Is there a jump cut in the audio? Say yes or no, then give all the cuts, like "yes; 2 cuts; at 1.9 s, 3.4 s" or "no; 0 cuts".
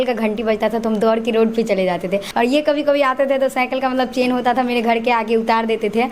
yes; 1 cut; at 2.3 s